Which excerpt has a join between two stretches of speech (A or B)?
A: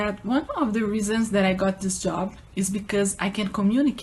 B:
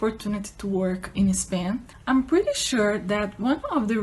B